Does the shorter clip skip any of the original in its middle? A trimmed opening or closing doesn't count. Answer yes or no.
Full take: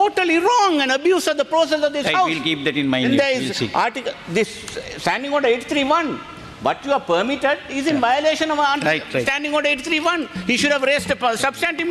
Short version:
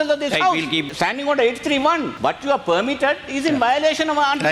yes